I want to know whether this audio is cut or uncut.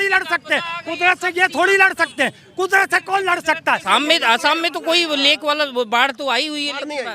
cut